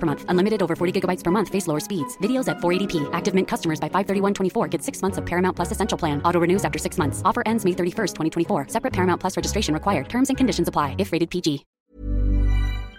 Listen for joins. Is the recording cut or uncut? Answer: cut